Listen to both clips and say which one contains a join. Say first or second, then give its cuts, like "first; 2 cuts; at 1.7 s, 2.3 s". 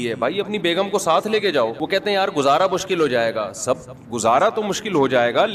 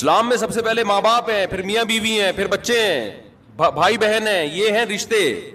first; 1 cut; at 1.8 s